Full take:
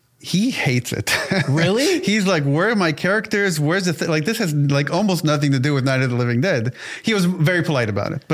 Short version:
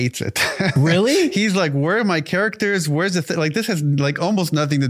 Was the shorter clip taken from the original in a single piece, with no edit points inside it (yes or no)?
yes